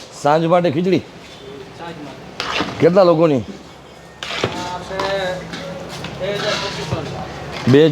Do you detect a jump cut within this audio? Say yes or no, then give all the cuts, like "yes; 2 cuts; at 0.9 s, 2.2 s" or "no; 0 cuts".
no; 0 cuts